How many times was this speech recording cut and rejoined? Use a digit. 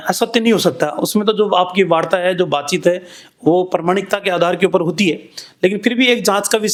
0